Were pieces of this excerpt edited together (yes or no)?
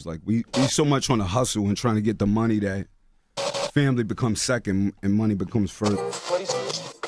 yes